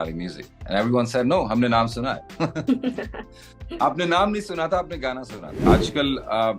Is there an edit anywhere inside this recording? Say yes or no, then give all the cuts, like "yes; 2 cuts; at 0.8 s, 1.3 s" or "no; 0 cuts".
yes; 1 cut; at 5.6 s